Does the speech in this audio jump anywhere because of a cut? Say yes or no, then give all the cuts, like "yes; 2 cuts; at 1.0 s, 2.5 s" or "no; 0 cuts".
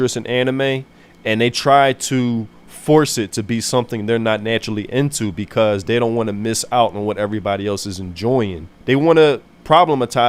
no; 0 cuts